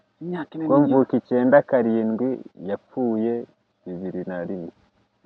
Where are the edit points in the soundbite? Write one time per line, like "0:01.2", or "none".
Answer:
none